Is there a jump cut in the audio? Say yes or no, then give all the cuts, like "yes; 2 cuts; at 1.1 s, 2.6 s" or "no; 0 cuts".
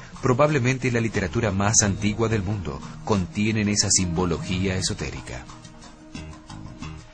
no; 0 cuts